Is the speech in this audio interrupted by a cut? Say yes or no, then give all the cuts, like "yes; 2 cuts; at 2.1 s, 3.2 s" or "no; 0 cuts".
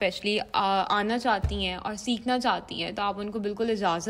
no; 0 cuts